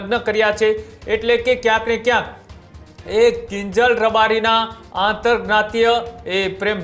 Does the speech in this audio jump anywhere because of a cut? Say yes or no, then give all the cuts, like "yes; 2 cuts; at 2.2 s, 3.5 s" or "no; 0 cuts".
no; 0 cuts